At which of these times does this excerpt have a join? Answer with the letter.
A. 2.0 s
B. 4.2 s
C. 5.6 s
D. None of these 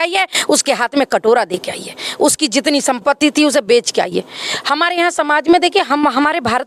D